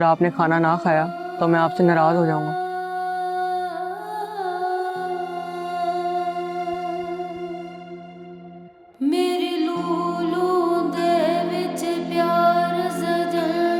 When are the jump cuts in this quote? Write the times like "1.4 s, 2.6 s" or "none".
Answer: none